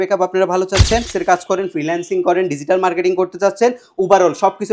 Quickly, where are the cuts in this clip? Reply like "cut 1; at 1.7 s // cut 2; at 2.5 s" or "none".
cut 1; at 1.1 s